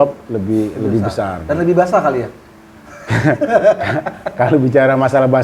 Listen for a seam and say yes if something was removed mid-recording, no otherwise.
no